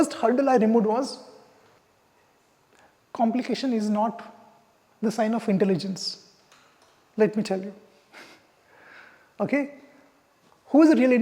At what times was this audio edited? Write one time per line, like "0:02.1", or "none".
0:01.8